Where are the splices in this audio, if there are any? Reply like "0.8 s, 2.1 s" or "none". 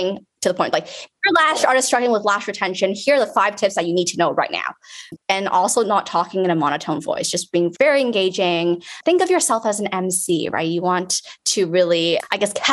5.1 s, 7.7 s